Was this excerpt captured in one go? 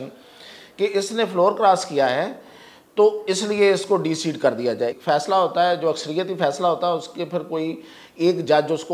no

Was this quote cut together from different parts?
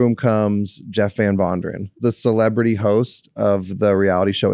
yes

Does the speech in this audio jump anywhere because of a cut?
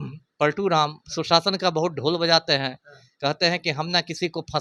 no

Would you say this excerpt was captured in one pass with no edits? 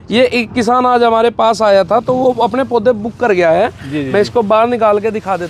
yes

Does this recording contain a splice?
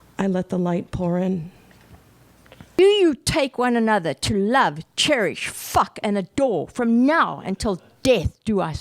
yes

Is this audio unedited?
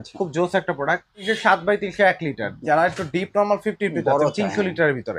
no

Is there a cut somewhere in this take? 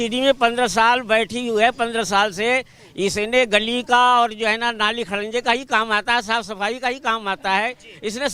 no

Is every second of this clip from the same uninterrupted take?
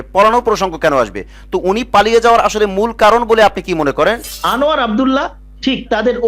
no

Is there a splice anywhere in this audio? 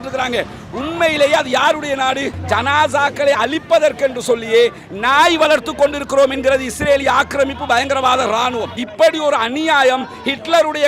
yes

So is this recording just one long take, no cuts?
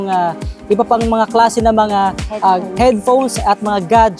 yes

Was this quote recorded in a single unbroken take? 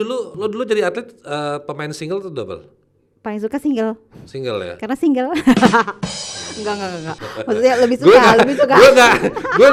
yes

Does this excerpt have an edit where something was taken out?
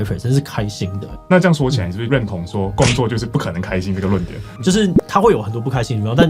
yes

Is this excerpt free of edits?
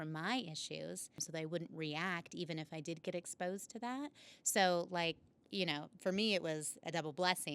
no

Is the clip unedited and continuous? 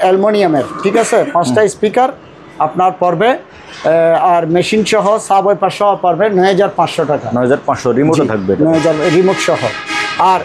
yes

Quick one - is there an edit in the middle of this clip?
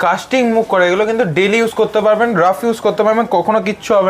no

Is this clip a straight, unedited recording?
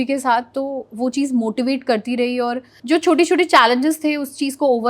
no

